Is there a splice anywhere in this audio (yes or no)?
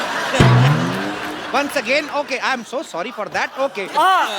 no